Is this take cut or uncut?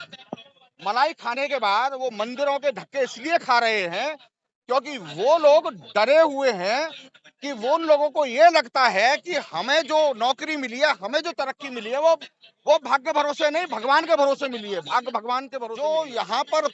cut